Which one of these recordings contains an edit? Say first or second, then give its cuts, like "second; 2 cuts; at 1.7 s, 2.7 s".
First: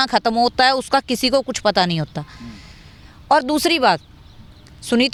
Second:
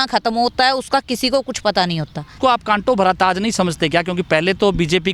second; 1 cut; at 2.4 s